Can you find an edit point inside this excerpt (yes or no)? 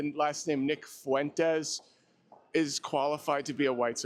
no